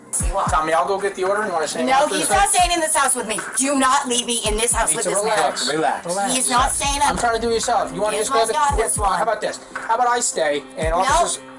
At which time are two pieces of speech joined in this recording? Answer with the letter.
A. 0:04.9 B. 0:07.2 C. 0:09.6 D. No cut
D